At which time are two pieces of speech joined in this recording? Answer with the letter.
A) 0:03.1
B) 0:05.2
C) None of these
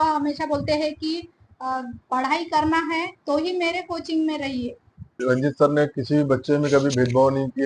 B